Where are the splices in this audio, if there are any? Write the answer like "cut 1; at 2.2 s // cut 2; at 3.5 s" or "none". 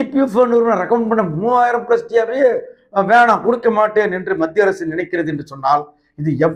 none

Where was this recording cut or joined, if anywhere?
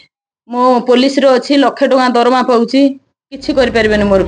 none

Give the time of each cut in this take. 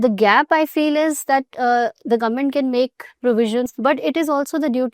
cut 1; at 3.7 s

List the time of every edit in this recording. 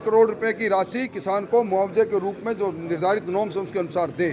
none

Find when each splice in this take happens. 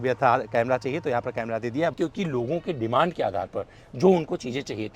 cut 1; at 2.0 s

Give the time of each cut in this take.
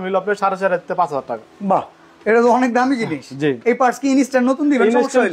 none

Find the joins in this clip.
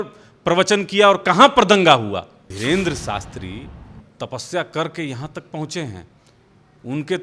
cut 1; at 2.5 s

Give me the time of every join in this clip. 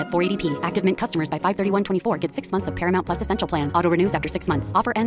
none

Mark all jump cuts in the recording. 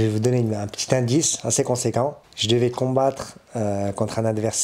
cut 1; at 2.3 s

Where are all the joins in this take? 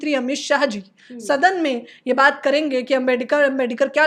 none

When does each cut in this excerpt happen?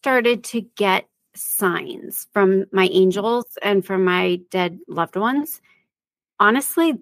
none

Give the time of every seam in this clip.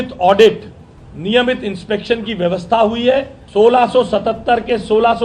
cut 1; at 3.4 s

